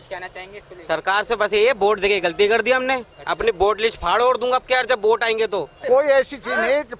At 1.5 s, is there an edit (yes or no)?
no